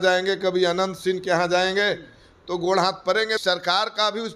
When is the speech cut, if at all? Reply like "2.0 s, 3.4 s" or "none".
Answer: 3.4 s